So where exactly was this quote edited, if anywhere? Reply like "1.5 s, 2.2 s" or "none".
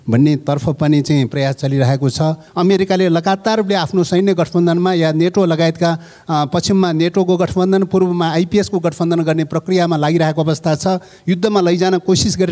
2.4 s